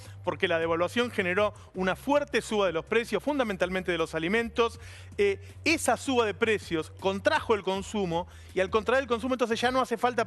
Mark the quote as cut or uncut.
cut